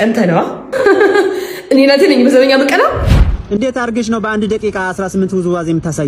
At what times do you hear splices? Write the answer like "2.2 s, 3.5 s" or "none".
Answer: 3.4 s